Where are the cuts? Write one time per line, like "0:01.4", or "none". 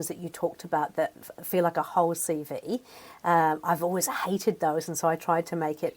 none